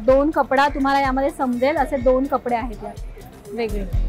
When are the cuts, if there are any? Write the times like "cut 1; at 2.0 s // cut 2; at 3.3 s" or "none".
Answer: none